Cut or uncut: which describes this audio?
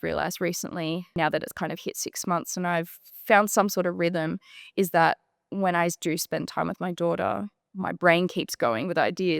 cut